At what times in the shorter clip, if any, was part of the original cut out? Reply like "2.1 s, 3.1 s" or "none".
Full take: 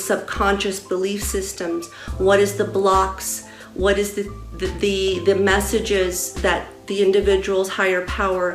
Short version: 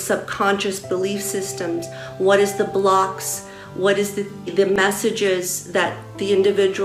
4.5 s